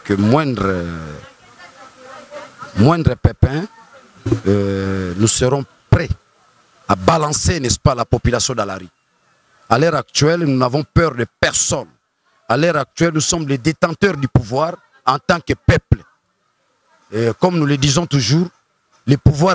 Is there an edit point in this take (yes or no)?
no